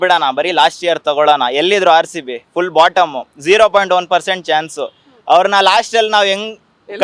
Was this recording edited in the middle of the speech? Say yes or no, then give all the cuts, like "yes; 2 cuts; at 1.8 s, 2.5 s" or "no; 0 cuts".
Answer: no; 0 cuts